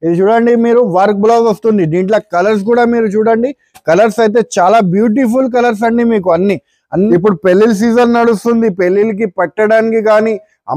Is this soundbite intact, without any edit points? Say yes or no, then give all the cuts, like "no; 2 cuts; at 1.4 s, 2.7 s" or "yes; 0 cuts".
no; 1 cut; at 7.1 s